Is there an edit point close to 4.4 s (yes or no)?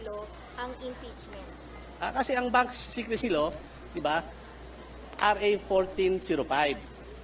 no